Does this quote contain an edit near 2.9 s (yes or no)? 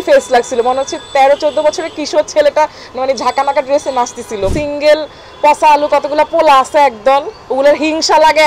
no